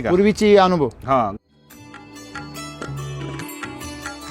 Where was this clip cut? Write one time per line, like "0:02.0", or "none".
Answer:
0:01.3